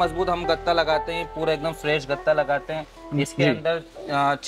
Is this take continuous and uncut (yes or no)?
yes